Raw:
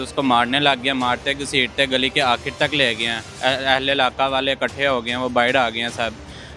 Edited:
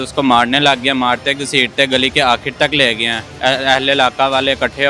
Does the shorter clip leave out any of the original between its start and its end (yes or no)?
no